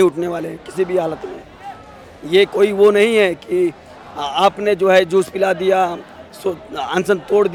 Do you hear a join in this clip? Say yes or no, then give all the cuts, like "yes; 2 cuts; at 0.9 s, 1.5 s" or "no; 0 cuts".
no; 0 cuts